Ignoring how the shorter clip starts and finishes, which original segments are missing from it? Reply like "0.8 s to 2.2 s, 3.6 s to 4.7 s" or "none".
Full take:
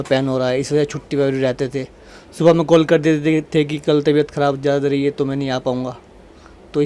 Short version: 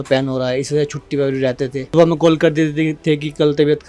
1.8 s to 2.3 s